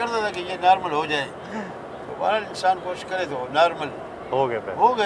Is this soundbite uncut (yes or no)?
yes